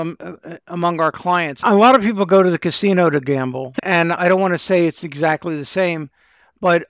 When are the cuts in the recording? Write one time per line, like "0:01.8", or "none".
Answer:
0:01.6
0:03.7